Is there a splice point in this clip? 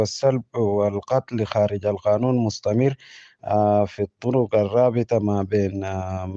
no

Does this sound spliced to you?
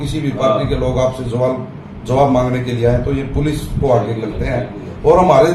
no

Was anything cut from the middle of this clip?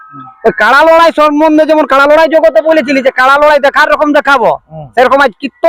no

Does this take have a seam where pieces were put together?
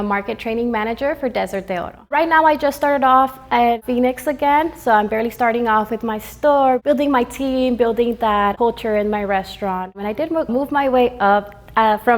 yes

